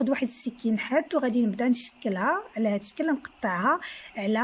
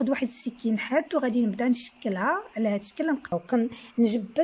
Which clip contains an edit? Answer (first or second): second